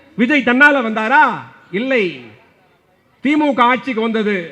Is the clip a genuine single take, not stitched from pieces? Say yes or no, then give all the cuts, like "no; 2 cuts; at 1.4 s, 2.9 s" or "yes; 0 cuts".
yes; 0 cuts